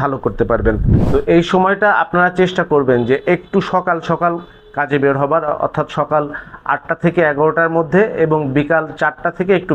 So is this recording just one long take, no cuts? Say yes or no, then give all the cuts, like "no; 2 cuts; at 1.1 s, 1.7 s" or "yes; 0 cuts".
no; 1 cut; at 0.9 s